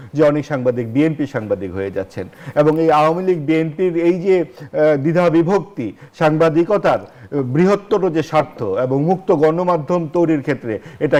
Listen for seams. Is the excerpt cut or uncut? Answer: uncut